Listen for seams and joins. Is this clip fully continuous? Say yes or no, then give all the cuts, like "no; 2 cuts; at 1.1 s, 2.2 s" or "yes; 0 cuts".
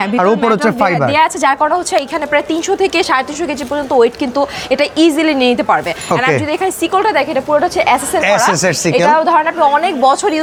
yes; 0 cuts